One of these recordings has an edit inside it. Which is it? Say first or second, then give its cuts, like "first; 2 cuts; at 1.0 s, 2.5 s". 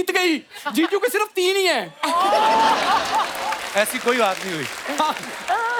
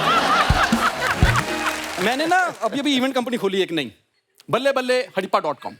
second; 1 cut; at 1.8 s